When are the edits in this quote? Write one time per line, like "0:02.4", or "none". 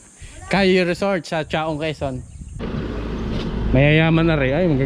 0:02.5